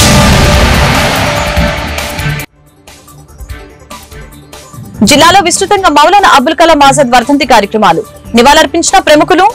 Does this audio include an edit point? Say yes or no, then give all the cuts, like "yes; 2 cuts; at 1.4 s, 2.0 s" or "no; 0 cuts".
no; 0 cuts